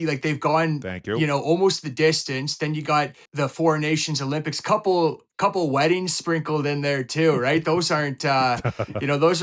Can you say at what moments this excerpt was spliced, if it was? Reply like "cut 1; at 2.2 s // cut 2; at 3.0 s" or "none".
cut 1; at 3.3 s